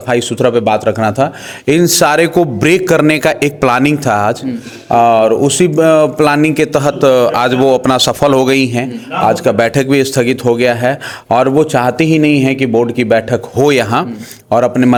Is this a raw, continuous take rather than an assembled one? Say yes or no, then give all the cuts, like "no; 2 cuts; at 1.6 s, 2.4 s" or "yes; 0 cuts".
yes; 0 cuts